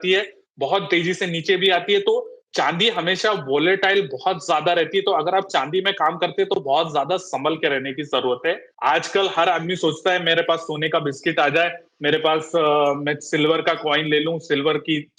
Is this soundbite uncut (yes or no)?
no